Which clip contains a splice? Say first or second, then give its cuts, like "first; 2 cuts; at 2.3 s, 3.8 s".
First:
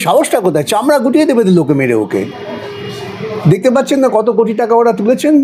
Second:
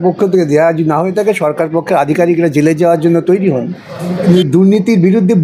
second; 1 cut; at 4.2 s